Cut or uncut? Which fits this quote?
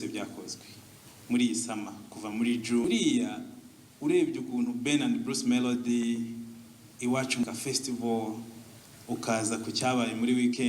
cut